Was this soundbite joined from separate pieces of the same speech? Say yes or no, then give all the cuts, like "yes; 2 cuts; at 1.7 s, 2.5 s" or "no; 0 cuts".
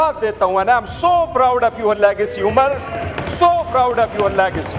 no; 0 cuts